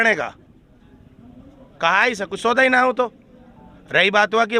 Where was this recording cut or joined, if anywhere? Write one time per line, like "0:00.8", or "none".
none